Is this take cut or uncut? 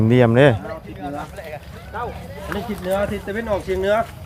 uncut